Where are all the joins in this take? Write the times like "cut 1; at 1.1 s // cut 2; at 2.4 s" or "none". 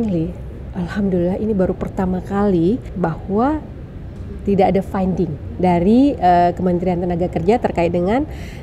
cut 1; at 2.9 s